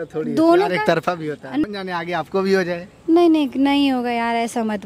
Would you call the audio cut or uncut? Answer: cut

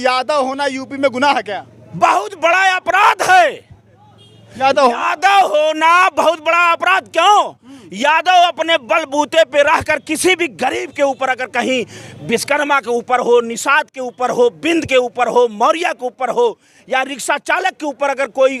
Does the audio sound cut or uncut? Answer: uncut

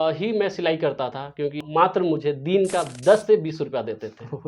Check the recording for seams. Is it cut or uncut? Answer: cut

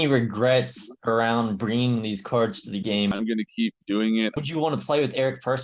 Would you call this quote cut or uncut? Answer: cut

